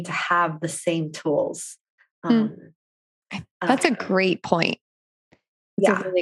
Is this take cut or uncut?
uncut